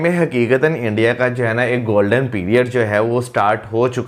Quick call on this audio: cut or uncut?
uncut